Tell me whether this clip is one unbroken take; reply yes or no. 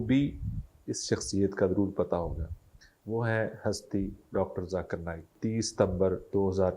no